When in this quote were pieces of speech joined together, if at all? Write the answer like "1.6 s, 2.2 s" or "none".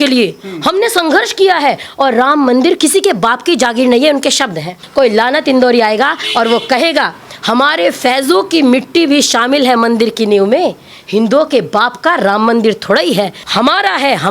2.8 s, 4.8 s, 13.4 s